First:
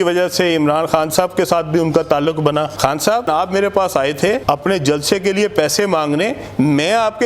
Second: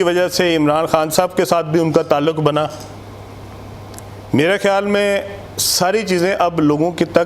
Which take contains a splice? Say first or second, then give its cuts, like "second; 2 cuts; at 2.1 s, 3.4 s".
first; 2 cuts; at 3.3 s, 4.4 s